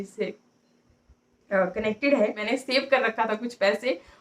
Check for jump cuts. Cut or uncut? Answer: cut